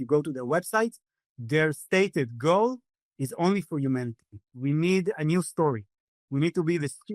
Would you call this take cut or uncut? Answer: cut